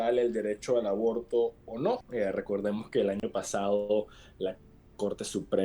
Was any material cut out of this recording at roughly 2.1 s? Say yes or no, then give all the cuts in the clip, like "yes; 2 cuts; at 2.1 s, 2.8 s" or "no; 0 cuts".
yes; 1 cut; at 2.1 s